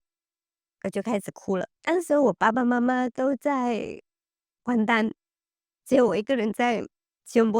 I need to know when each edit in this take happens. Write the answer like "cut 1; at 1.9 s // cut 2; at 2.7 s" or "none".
cut 1; at 1.7 s